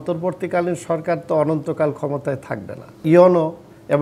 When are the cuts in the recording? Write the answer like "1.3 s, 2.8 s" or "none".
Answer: 3.0 s